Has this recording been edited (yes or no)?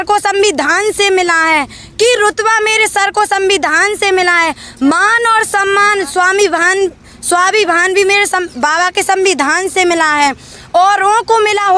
no